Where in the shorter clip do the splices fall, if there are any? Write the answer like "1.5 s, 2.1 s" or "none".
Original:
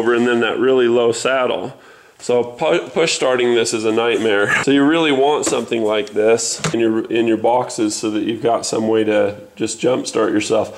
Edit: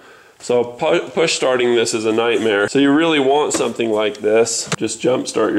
2.7 s, 4.6 s